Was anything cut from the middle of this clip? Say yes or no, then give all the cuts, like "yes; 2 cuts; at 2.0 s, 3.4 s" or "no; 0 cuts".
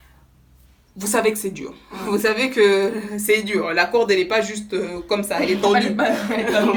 no; 0 cuts